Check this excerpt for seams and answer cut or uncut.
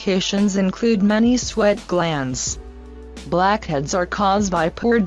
cut